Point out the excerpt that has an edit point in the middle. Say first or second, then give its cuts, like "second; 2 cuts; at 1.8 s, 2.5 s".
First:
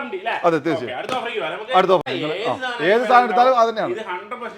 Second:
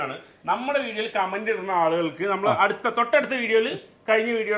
first; 1 cut; at 2.1 s